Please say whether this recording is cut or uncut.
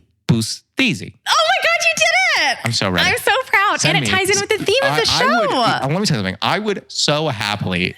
cut